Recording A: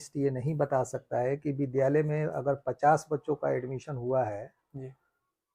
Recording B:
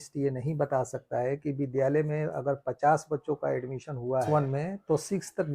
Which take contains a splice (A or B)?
B